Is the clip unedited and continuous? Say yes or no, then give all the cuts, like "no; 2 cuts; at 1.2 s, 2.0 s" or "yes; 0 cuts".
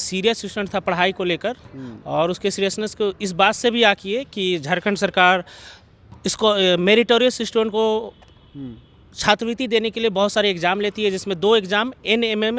yes; 0 cuts